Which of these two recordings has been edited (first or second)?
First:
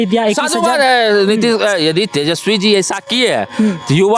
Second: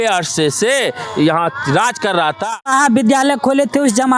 second